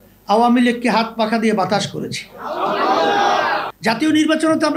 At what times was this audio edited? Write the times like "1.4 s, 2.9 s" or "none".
3.7 s